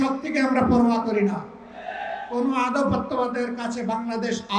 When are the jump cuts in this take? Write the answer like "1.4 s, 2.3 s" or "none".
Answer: none